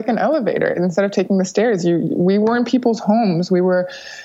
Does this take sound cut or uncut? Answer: uncut